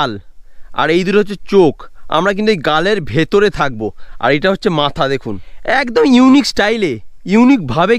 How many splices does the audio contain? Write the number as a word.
zero